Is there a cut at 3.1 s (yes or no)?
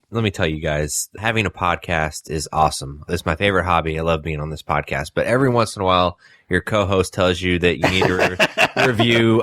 yes